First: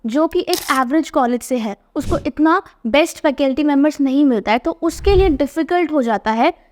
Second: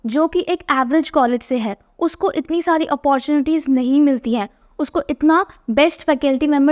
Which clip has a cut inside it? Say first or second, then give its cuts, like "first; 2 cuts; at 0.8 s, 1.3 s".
first; 1 cut; at 1.8 s